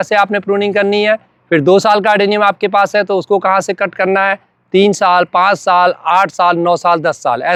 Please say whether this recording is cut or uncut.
uncut